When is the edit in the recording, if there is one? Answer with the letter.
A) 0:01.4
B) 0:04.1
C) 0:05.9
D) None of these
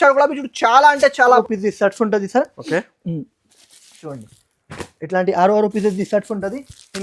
A